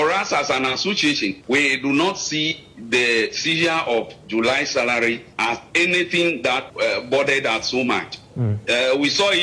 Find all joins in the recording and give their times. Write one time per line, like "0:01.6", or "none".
0:01.4
0:06.7